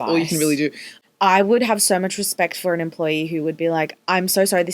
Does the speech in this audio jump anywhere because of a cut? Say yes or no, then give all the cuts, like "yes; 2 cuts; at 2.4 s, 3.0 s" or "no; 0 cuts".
yes; 1 cut; at 0.9 s